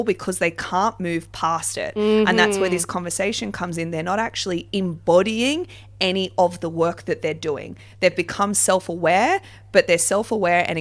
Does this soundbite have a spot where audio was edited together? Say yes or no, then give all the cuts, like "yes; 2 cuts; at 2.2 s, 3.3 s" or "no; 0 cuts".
no; 0 cuts